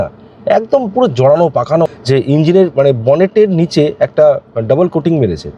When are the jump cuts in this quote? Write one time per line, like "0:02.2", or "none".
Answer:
0:01.9